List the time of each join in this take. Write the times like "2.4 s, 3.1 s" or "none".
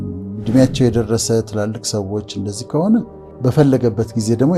3.2 s